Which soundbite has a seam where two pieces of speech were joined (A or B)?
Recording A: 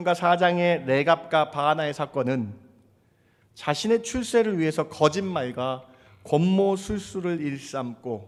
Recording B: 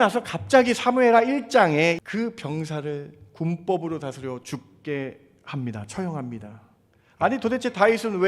B